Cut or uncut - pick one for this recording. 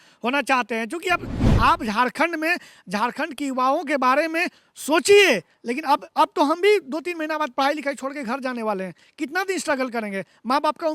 cut